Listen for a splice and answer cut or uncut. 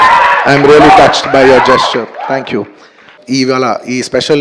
cut